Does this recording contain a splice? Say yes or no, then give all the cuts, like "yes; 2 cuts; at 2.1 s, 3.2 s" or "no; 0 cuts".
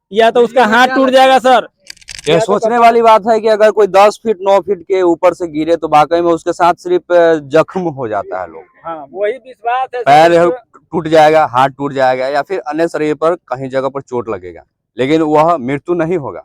no; 0 cuts